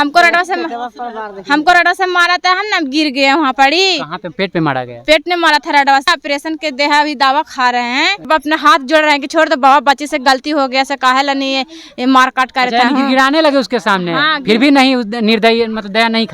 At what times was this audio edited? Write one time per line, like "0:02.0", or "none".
0:08.3

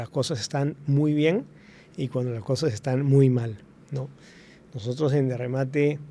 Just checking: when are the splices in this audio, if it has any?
none

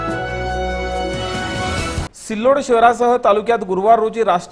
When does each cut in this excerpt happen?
0:02.0

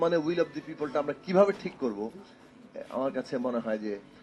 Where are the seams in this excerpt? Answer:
none

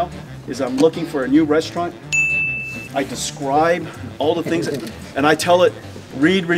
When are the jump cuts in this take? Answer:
none

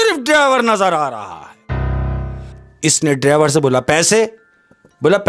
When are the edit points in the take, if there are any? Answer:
0:02.4

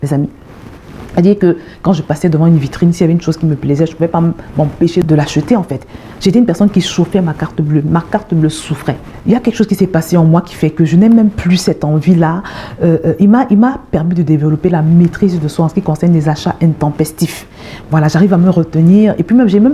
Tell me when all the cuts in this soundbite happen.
0:05.0
0:09.1

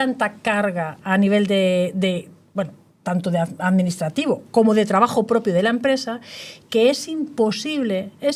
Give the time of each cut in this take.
none

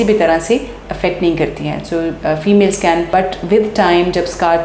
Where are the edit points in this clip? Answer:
0:03.1

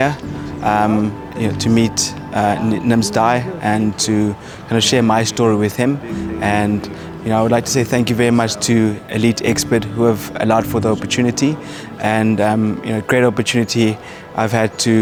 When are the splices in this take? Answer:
none

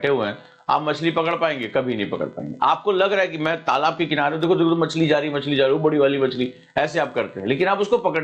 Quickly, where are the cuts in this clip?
none

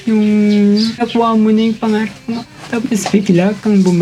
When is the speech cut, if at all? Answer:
0:01.0

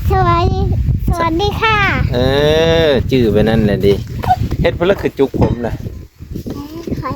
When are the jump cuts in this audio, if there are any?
0:04.5

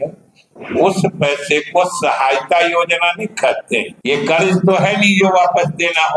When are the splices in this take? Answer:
0:03.9

